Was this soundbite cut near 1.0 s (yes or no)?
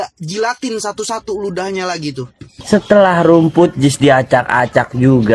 no